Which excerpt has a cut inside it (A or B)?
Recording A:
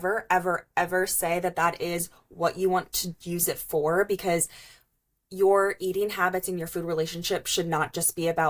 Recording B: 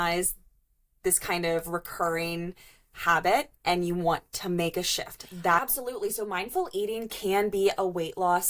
B